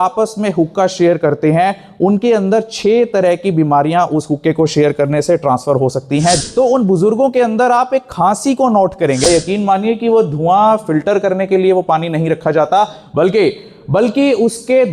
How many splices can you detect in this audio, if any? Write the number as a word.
two